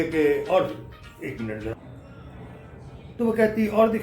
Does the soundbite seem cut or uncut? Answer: cut